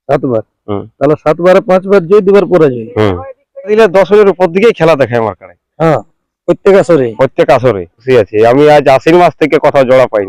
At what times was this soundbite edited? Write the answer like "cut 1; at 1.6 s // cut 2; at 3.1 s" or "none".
cut 1; at 3.7 s // cut 2; at 8.0 s

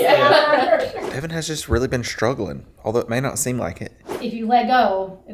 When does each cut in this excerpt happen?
cut 1; at 1.0 s // cut 2; at 4.1 s

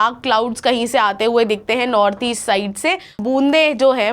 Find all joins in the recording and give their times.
cut 1; at 3.2 s

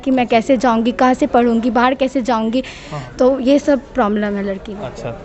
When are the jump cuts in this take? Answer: none

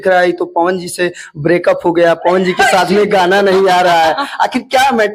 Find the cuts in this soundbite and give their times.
none

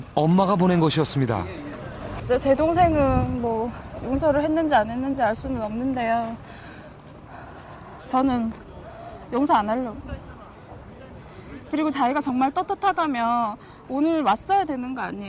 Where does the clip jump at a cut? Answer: cut 1; at 9.6 s

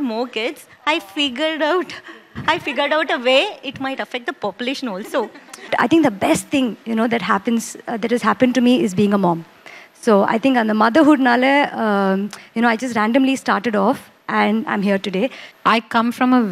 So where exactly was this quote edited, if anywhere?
cut 1; at 5.7 s // cut 2; at 15.5 s

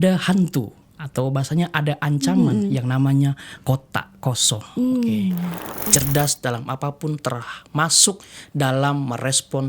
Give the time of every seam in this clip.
cut 1; at 5.9 s

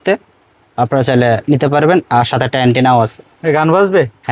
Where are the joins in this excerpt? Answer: none

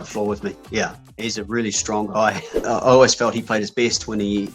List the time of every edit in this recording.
cut 1; at 1.0 s // cut 2; at 2.6 s

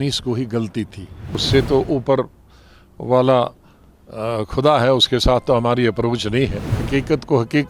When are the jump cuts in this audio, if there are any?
cut 1; at 1.4 s // cut 2; at 6.7 s

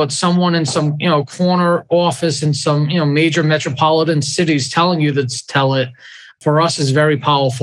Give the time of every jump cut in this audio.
none

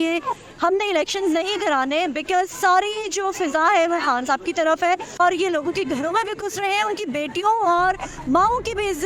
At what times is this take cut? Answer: cut 1; at 5.1 s

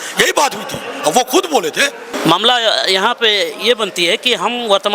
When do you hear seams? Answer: cut 1; at 2.1 s

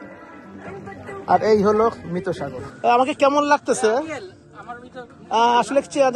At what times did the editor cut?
cut 1; at 2.6 s

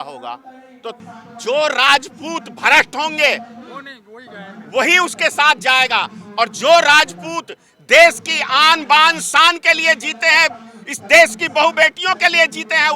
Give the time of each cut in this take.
cut 1; at 1.0 s

